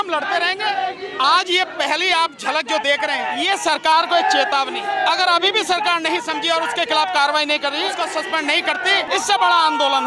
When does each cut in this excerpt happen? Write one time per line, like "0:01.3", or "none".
0:03.4
0:04.8
0:08.0
0:09.1